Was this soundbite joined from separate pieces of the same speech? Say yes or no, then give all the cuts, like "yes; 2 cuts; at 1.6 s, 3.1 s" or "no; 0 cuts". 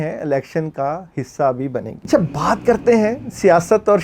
yes; 1 cut; at 1.9 s